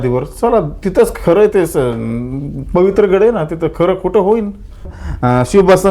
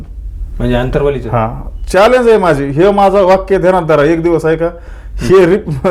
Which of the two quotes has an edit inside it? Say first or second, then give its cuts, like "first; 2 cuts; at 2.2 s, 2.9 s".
first; 1 cut; at 4.9 s